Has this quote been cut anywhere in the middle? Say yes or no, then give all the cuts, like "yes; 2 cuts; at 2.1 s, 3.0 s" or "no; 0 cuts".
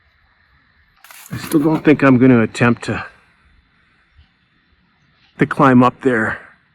yes; 1 cut; at 1.0 s